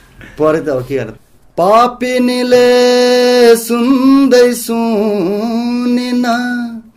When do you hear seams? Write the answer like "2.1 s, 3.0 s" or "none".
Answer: 1.1 s